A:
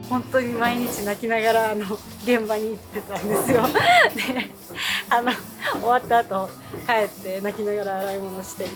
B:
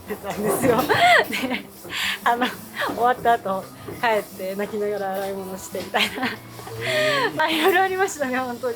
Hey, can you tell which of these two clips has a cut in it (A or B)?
B